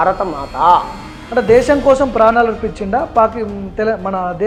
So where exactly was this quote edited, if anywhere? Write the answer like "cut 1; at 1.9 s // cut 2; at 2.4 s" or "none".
none